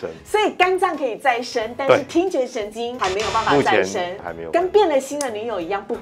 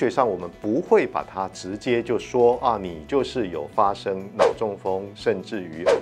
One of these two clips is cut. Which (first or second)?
first